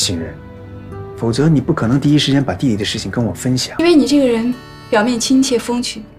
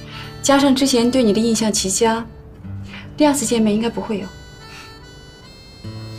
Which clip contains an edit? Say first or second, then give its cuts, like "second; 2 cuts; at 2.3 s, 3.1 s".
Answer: first; 1 cut; at 3.8 s